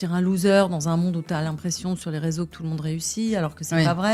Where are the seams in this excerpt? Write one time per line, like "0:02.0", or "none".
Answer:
none